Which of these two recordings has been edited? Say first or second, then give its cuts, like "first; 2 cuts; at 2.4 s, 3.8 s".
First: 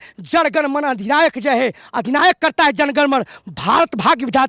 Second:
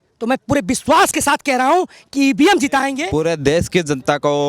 second; 1 cut; at 3.0 s